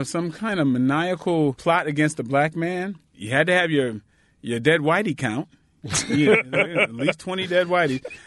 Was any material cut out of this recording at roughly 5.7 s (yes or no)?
no